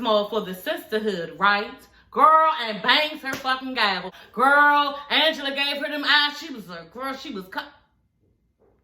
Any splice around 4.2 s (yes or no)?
yes